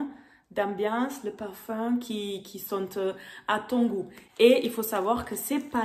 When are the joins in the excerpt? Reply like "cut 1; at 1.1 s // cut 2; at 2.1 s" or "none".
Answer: cut 1; at 4.2 s

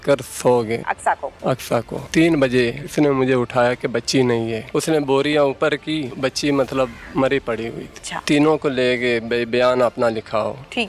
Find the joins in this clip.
cut 1; at 0.9 s // cut 2; at 2.0 s // cut 3; at 2.8 s // cut 4; at 4.6 s // cut 5; at 6.1 s // cut 6; at 7.0 s // cut 7; at 8.1 s

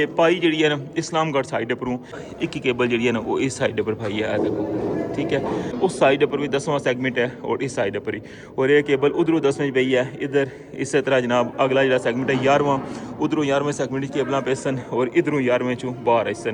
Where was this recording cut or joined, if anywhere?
cut 1; at 2.2 s // cut 2; at 5.8 s

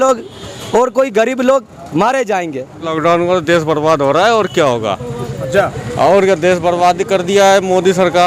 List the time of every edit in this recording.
cut 1; at 2.8 s

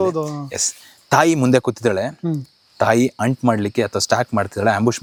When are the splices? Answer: none

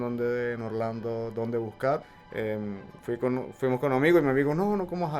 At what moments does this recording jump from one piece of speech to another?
cut 1; at 2.0 s

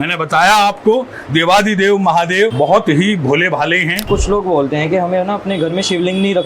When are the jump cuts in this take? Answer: cut 1; at 2.5 s // cut 2; at 4.1 s

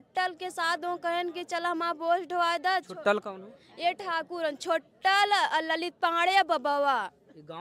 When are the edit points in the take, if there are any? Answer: none

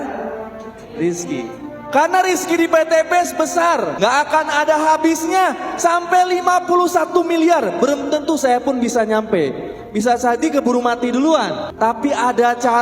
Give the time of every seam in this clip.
cut 1; at 3.9 s

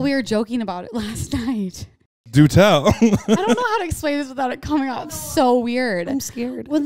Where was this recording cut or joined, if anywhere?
cut 1; at 2.4 s // cut 2; at 3.2 s

